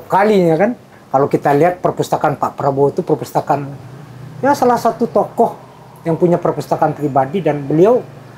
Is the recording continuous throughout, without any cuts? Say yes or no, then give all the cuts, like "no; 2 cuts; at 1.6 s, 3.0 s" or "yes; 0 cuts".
yes; 0 cuts